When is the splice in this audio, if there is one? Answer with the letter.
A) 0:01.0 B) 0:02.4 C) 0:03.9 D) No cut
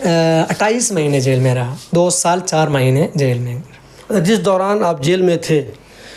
D